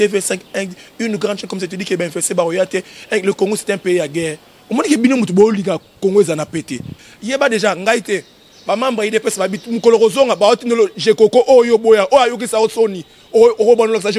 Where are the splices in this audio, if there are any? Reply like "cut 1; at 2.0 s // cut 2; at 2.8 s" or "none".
cut 1; at 6.9 s